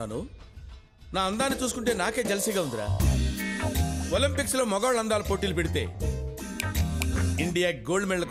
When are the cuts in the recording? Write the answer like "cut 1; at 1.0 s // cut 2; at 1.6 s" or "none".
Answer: none